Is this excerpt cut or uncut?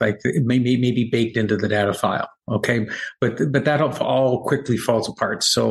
uncut